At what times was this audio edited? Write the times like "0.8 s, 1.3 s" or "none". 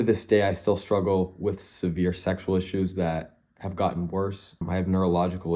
4.6 s